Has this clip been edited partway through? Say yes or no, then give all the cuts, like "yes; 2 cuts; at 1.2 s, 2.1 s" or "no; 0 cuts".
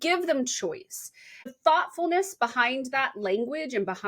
yes; 1 cut; at 1.5 s